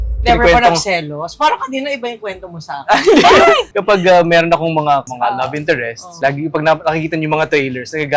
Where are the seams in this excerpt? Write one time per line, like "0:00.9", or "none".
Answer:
0:03.7
0:05.1